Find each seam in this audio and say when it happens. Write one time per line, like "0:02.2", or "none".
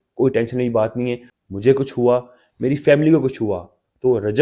0:01.3